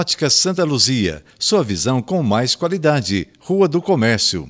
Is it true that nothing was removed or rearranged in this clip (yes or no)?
yes